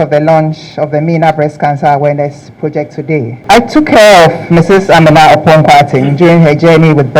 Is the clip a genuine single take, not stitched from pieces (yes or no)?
no